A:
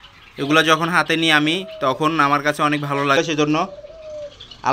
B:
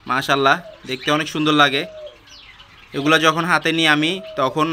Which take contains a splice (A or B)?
A